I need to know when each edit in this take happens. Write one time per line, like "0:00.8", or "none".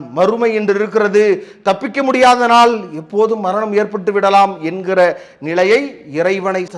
none